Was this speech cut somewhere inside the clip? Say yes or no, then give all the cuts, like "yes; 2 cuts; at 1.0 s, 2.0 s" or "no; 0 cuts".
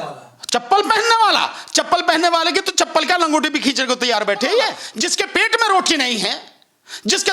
yes; 1 cut; at 4.8 s